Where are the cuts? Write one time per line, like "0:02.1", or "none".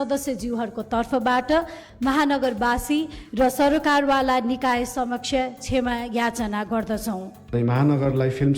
0:07.5